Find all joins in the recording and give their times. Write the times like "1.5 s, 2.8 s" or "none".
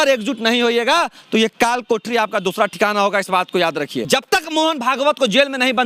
4.0 s